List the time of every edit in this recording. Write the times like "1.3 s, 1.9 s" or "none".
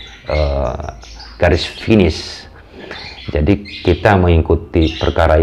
none